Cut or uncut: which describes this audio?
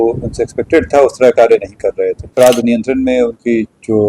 cut